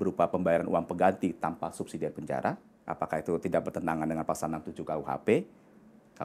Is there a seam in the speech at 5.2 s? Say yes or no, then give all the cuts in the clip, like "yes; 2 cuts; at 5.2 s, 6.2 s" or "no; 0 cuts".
no; 1 cut; at 2.7 s